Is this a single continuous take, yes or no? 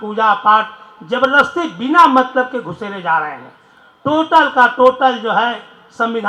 yes